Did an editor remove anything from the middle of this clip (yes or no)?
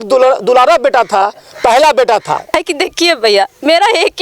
yes